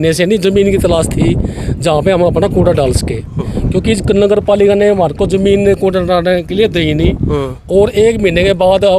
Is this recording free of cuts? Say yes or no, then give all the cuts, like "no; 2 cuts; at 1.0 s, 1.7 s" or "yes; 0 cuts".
yes; 0 cuts